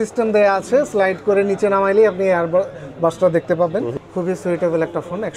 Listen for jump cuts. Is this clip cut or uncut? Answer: cut